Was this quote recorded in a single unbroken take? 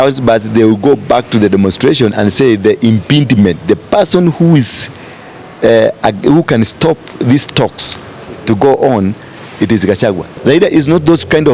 no; 1 cut; at 10.3 s

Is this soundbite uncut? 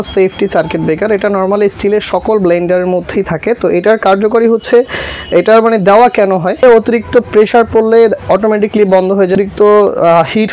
no; 2 cuts; at 6.6 s, 9.3 s

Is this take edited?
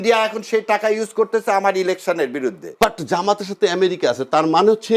yes; 1 cut; at 2.6 s

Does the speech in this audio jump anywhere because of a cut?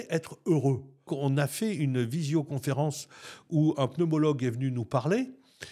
yes; 1 cut; at 1.1 s

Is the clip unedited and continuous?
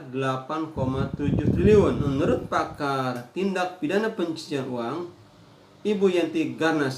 no; 1 cut; at 2.1 s

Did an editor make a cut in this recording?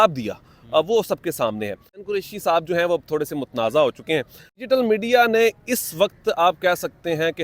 yes; 2 cuts; at 2.0 s, 4.6 s

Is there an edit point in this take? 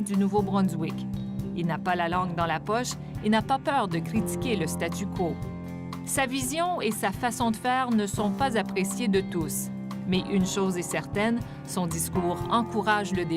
yes; 1 cut; at 12.4 s

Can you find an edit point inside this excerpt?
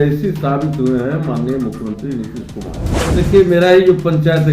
yes; 1 cut; at 3.0 s

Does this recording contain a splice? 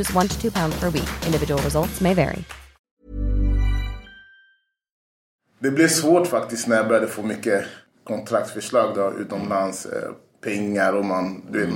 yes; 1 cut; at 5.0 s

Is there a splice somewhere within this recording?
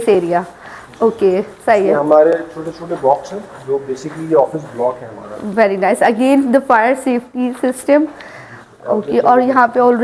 no; 0 cuts

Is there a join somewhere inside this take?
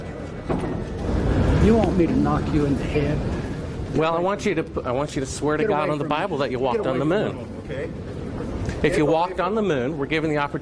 yes; 1 cut; at 1.0 s

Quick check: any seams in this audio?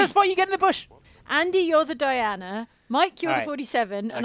yes; 1 cut; at 1.3 s

